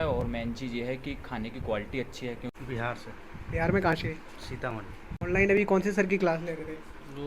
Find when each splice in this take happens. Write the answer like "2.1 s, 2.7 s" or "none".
2.5 s